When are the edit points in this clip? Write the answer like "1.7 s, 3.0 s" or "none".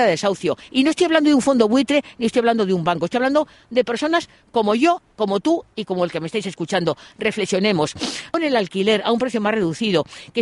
8.4 s